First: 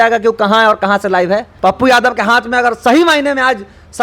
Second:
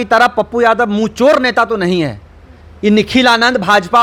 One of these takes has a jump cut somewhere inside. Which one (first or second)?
first